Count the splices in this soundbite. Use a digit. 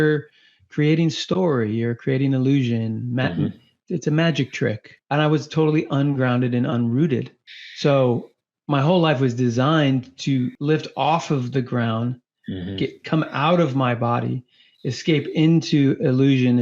2